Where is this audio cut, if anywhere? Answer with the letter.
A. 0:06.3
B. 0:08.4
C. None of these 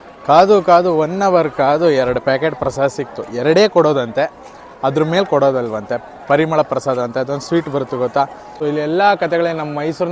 B